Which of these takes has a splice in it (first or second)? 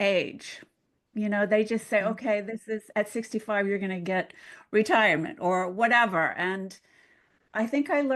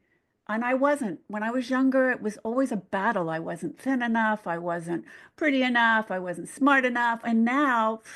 second